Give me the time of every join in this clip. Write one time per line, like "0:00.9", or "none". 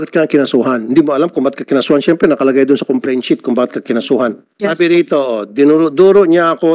0:04.5